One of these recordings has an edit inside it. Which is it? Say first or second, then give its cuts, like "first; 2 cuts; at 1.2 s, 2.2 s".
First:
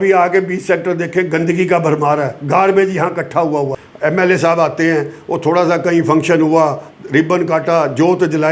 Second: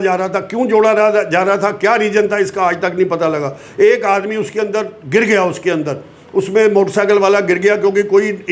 first; 1 cut; at 3.8 s